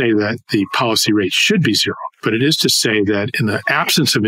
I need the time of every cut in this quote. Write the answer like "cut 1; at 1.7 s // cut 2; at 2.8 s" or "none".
none

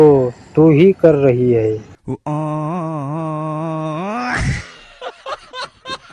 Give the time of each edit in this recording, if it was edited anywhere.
cut 1; at 1.9 s

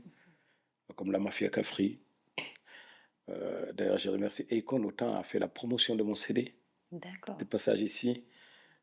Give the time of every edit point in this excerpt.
none

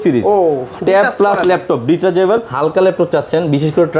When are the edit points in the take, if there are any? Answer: cut 1; at 2.5 s

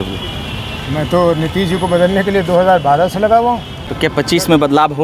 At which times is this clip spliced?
cut 1; at 3.8 s

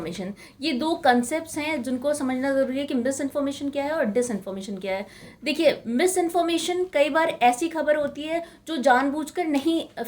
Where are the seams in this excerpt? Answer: none

